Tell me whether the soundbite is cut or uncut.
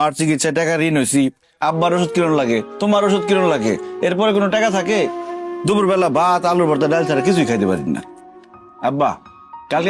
cut